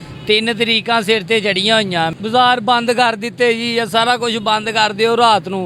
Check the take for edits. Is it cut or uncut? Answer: cut